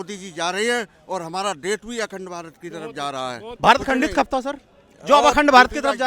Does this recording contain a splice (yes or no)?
yes